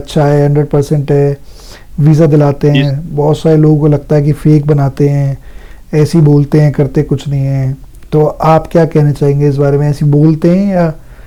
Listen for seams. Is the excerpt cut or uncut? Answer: uncut